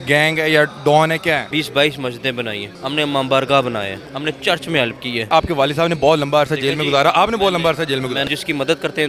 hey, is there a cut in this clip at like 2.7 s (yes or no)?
yes